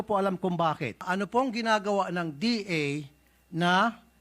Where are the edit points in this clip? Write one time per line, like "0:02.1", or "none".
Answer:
0:01.1